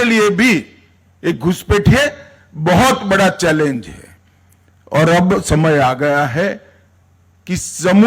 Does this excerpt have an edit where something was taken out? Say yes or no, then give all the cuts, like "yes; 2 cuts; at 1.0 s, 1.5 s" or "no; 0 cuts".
no; 0 cuts